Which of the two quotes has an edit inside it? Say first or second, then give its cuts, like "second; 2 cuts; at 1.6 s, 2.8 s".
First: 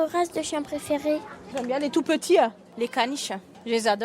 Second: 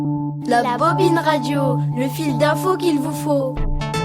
first; 2 cuts; at 1.3 s, 3.0 s